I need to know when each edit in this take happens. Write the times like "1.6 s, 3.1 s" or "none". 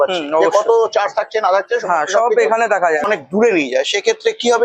3.0 s